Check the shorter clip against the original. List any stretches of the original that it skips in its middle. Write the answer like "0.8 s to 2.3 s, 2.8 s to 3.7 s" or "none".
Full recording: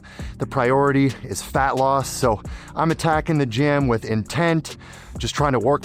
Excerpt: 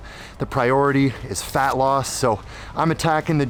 none